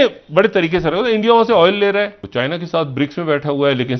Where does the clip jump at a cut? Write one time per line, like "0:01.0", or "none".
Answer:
0:02.2